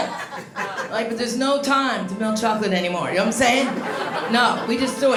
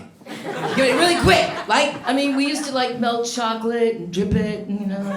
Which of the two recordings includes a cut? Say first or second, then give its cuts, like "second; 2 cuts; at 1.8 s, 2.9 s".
second; 1 cut; at 2.0 s